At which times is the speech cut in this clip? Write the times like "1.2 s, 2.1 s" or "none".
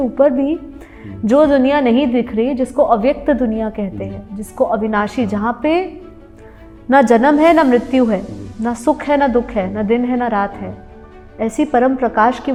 none